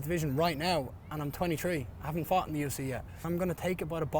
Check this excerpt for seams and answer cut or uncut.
cut